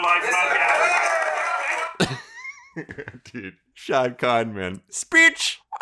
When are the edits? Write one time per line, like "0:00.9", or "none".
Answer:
0:03.7